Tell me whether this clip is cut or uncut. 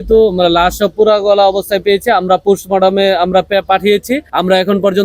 uncut